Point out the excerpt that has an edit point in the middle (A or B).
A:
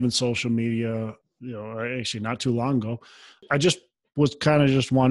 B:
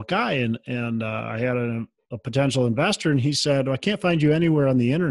A